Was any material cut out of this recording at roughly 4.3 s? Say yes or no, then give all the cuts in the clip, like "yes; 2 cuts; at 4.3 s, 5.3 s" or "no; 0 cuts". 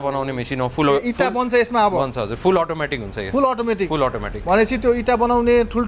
no; 0 cuts